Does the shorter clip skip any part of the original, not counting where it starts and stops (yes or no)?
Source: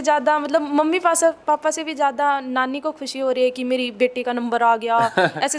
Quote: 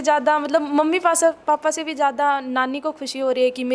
no